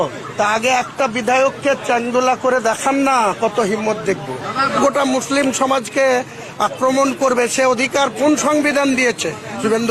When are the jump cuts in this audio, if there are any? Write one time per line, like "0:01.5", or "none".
0:04.8